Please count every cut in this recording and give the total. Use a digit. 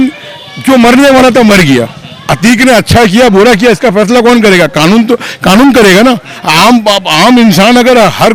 0